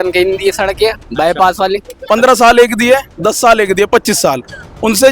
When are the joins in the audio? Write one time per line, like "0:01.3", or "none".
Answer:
0:01.9